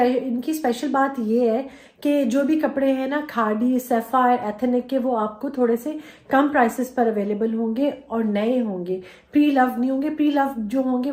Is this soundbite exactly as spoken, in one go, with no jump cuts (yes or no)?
yes